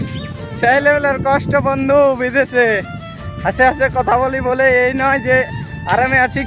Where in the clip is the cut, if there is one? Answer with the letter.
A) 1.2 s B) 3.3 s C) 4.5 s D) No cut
D